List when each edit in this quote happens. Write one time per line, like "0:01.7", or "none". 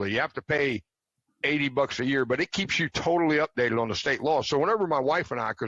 none